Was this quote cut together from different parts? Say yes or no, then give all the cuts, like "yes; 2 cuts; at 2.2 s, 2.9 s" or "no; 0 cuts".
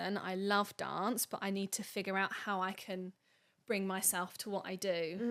no; 0 cuts